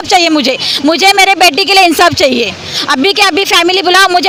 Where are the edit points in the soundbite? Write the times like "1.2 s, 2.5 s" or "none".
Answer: none